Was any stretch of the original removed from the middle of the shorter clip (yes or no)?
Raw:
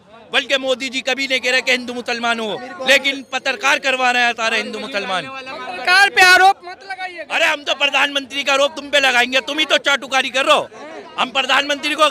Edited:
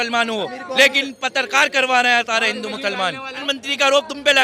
yes